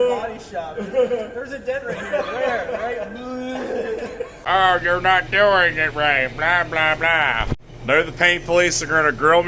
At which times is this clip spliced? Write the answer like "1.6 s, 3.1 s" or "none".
4.3 s, 7.7 s